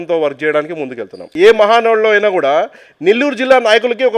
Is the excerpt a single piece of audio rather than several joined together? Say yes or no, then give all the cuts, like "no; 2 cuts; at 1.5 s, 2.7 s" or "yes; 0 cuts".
no; 1 cut; at 1.3 s